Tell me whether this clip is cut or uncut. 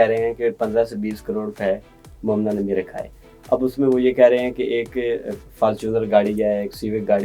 uncut